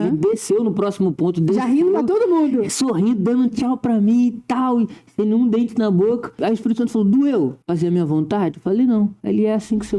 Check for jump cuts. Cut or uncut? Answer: cut